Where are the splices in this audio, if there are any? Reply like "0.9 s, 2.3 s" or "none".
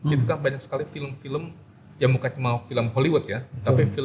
none